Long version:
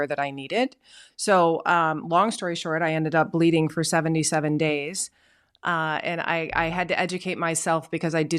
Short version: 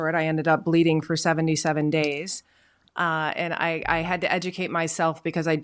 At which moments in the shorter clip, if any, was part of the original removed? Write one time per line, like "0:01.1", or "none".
none